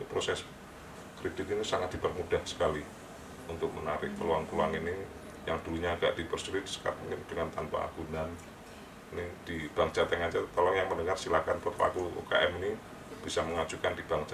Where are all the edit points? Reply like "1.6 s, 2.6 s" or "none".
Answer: none